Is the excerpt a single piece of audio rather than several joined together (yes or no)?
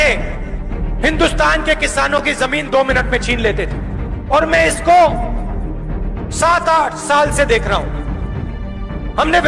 yes